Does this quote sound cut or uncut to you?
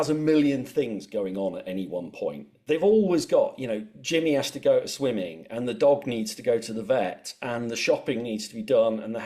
uncut